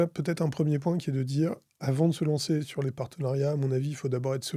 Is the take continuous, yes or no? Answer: yes